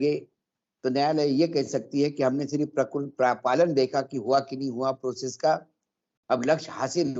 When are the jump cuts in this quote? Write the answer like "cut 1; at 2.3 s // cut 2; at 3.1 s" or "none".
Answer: none